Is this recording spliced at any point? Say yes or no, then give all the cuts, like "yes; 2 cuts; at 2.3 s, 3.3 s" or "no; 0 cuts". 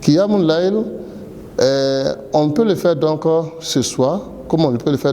no; 0 cuts